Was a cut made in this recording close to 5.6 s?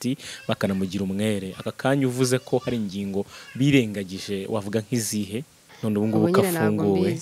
yes; 1 cut; at 5.6 s

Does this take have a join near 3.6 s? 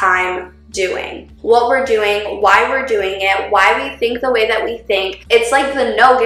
no; 2 cuts; at 1.3 s, 5.3 s

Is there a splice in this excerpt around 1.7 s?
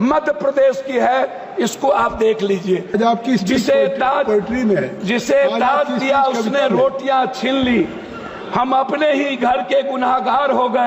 no; 1 cut; at 2.9 s

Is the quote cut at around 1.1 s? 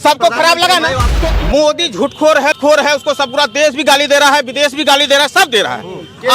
yes; 2 cuts; at 1.1 s, 2.5 s

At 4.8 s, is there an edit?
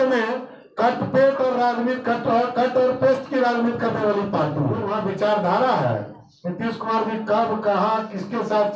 yes; 1 cut; at 4.8 s

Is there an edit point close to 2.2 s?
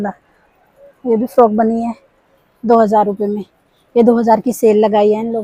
no; 0 cuts

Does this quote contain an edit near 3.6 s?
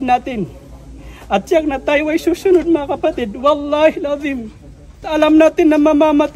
no; 1 cut; at 5.1 s

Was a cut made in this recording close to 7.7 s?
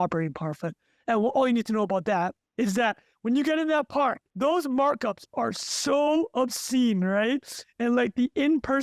no; 2 cuts; at 2.4 s, 4.2 s

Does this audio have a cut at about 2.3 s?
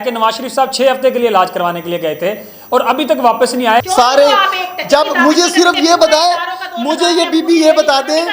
no; 1 cut; at 3.9 s

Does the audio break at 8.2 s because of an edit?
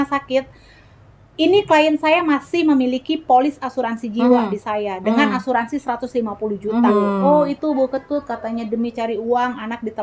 no; 1 cut; at 6.9 s

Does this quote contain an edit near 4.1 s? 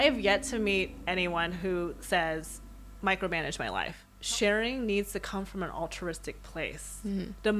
yes; 1 cut; at 4.1 s

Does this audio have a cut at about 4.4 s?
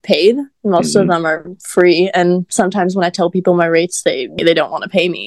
yes; 1 cut; at 4.4 s

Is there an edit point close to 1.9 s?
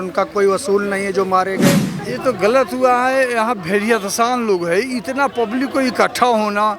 yes; 1 cut; at 1.9 s

